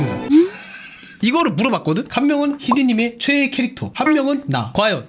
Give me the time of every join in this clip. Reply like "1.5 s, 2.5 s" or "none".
2.1 s